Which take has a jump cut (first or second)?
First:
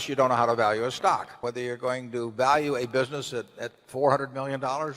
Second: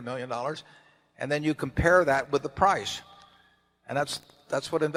first